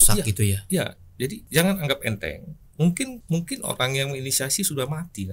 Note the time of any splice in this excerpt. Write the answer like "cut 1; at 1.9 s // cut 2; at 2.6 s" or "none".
cut 1; at 1.4 s // cut 2; at 3.2 s